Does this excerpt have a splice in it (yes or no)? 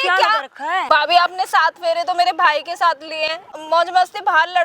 yes